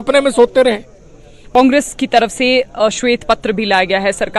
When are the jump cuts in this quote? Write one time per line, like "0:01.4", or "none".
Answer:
0:01.6